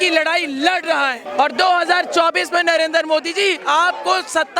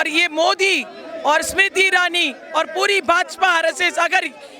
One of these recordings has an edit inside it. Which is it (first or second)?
first